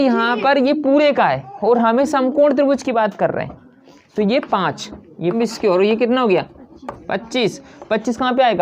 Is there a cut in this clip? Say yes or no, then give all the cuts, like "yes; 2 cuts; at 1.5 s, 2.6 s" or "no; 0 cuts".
yes; 1 cut; at 5.3 s